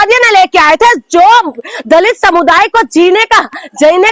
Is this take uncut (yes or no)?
yes